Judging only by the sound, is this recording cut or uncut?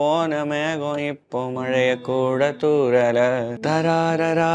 cut